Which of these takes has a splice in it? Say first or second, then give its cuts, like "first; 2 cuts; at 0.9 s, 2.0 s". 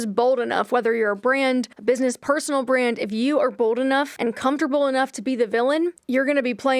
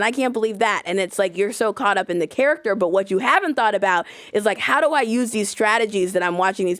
first; 3 cuts; at 1.7 s, 4.1 s, 6.0 s